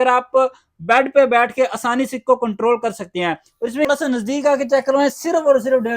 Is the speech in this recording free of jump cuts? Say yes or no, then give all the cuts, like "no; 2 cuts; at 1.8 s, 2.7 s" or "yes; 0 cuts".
no; 1 cut; at 3.9 s